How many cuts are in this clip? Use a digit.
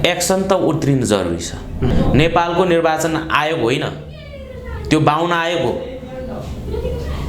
1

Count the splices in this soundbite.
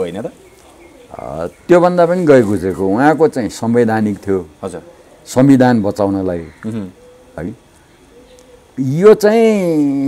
0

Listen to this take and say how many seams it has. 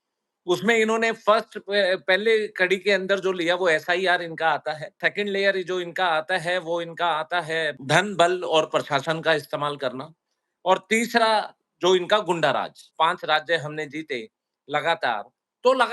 3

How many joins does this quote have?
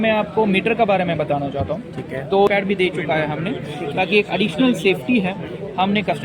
1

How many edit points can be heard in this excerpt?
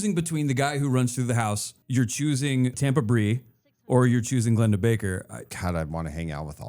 3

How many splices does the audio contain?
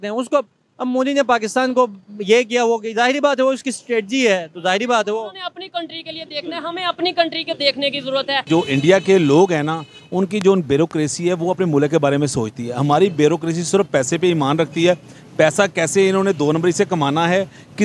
1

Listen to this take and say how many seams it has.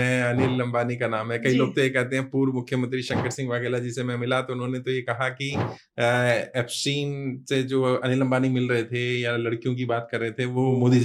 0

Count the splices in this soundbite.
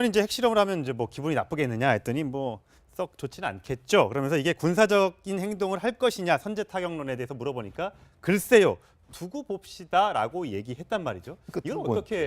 1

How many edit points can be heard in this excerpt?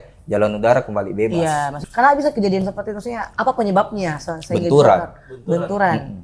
2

